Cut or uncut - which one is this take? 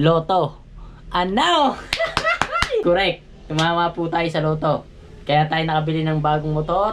cut